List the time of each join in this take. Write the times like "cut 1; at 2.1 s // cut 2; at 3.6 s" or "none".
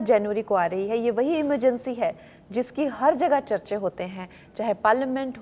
none